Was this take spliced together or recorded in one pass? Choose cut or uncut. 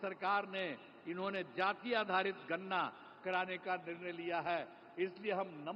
uncut